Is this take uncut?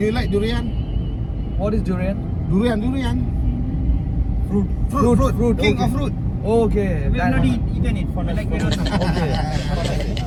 yes; 0 cuts

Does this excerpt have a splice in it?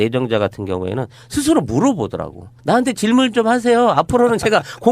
yes; 1 cut; at 3.6 s

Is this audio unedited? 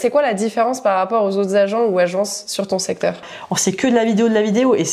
no; 1 cut; at 3.2 s

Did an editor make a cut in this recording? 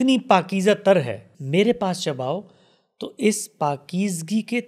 yes; 1 cut; at 1.3 s

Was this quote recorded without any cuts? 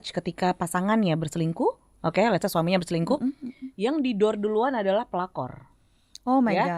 yes; 0 cuts

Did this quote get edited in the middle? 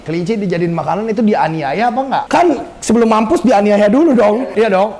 no; 0 cuts

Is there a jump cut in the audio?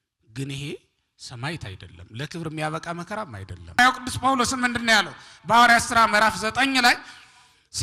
yes; 1 cut; at 3.8 s

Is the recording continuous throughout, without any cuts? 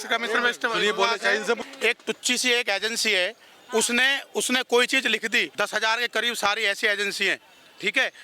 no; 2 cuts; at 1.6 s, 5.5 s

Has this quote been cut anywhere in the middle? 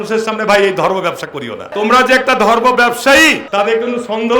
yes; 2 cuts; at 1.7 s, 3.4 s

